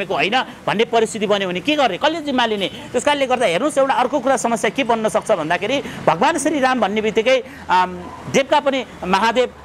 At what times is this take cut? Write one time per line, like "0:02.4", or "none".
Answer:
none